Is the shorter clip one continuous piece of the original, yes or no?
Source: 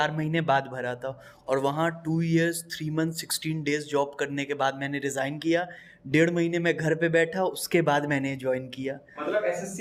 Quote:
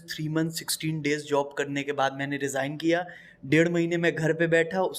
yes